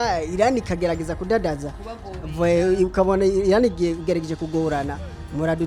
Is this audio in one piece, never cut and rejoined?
yes; 0 cuts

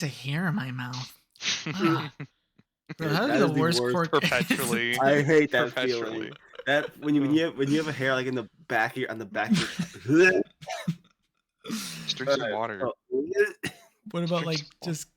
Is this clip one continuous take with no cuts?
yes; 0 cuts

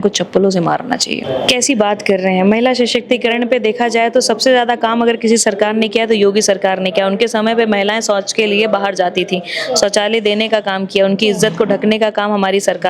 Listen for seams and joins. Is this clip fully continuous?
no; 1 cut; at 1.2 s

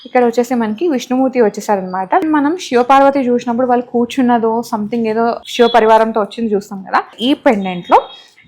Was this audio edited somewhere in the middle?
yes; 3 cuts; at 2.2 s, 5.4 s, 7.2 s

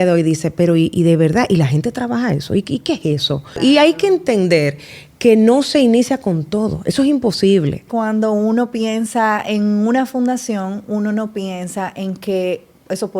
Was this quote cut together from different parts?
yes; 2 cuts; at 3.6 s, 7.9 s

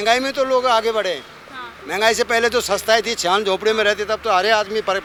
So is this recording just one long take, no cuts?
yes; 0 cuts

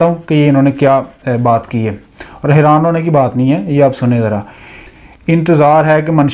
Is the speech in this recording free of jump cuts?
yes; 0 cuts

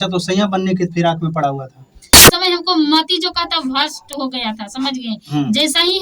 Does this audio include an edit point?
yes; 1 cut; at 2.3 s

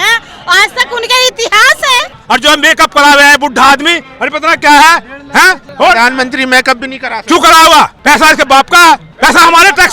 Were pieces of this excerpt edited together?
yes; 4 cuts; at 2.1 s, 5.6 s, 8.0 s, 9.1 s

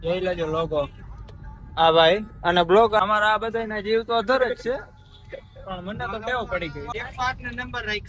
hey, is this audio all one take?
no; 2 cuts; at 3.0 s, 6.9 s

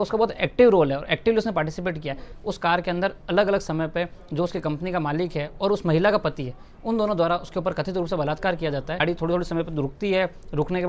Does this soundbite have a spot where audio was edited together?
yes; 2 cuts; at 2.3 s, 9.0 s

